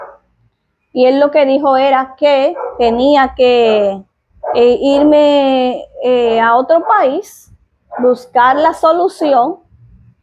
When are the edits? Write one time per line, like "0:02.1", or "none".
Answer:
none